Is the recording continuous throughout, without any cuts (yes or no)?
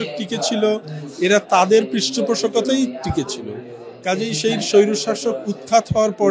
yes